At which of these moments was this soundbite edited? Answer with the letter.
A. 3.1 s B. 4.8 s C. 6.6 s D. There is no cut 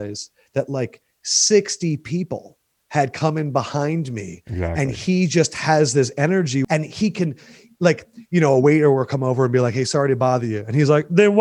C